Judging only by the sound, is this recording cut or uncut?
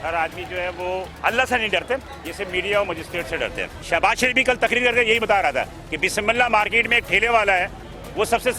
cut